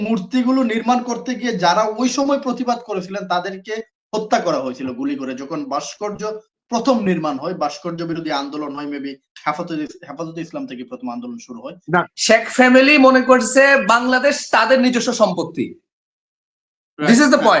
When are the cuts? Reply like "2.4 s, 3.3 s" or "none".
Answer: 12.1 s